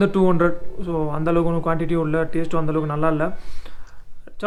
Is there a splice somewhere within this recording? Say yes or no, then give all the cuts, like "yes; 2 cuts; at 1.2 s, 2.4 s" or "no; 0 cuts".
no; 0 cuts